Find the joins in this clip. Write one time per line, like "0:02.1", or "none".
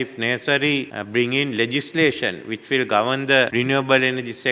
0:01.0
0:03.5